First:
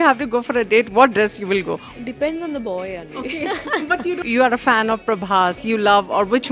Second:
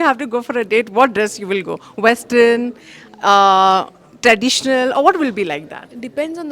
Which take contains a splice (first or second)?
first